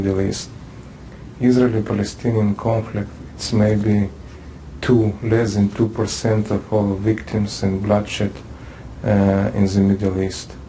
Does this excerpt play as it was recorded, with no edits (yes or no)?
yes